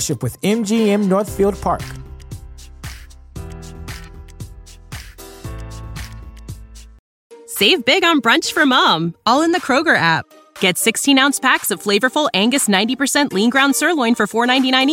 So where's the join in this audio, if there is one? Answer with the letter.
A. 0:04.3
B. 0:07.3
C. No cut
B